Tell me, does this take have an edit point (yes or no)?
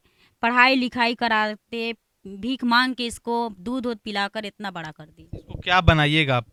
no